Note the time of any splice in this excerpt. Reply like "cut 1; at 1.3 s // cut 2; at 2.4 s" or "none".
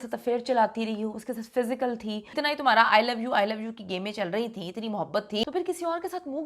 cut 1; at 2.3 s // cut 2; at 5.4 s